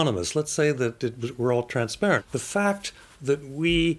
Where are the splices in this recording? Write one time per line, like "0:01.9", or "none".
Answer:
0:02.2